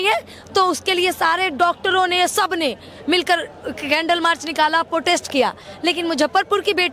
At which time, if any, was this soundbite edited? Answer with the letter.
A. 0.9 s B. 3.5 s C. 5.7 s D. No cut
D